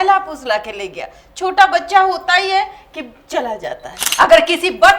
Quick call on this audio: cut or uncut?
cut